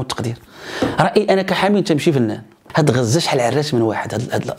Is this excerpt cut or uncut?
cut